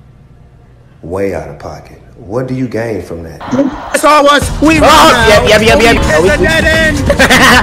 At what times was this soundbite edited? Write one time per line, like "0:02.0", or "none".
0:03.4
0:06.0